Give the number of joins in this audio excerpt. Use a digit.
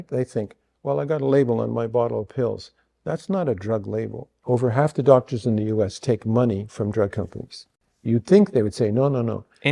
1